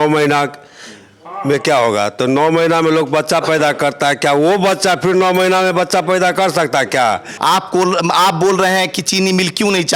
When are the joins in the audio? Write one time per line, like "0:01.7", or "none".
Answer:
0:07.3